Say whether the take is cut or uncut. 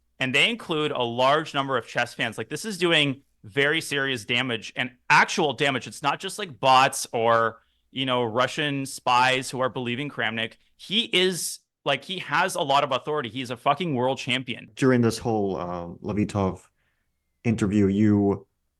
cut